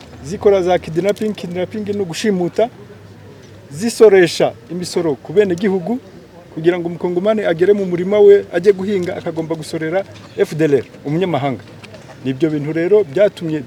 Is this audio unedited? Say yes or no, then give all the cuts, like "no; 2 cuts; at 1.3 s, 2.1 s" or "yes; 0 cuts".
yes; 0 cuts